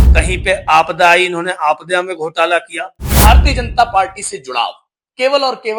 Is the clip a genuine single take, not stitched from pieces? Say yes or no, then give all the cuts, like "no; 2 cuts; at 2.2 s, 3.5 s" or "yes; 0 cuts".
no; 1 cut; at 3.2 s